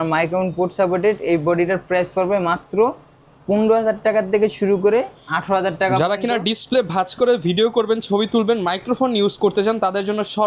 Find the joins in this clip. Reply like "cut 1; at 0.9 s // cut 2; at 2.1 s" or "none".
none